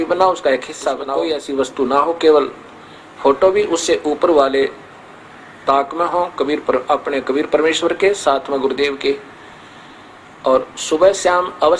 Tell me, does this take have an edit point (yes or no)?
yes